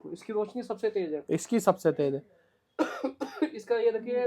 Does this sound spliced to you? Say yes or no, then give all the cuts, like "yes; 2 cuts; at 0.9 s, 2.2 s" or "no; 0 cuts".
no; 0 cuts